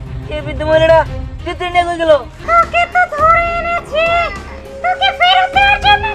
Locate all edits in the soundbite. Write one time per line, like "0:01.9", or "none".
0:02.3